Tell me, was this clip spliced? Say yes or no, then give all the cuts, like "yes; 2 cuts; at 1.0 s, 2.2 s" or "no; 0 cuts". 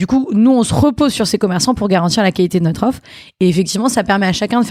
no; 0 cuts